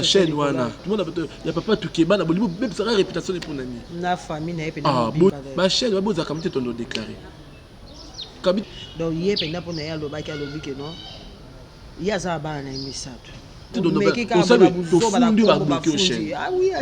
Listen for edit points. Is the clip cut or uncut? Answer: cut